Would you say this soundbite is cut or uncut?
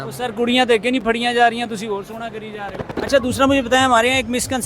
cut